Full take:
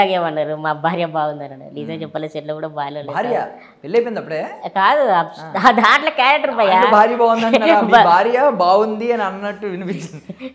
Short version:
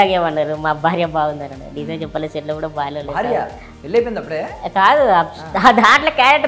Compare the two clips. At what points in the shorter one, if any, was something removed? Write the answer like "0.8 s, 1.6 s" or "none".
none